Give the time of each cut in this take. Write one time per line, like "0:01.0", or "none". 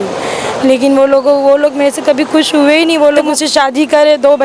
0:03.3

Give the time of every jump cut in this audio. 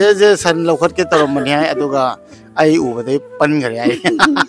none

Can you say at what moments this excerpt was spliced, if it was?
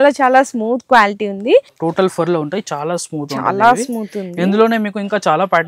0:01.7

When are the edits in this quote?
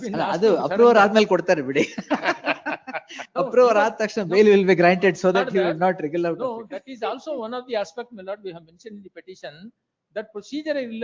none

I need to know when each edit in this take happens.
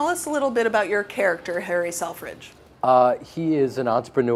none

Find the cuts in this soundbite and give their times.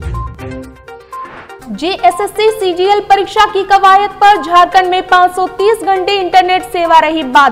0:01.2

